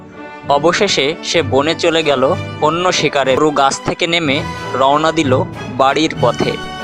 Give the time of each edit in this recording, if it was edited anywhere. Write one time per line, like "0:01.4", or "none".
0:03.4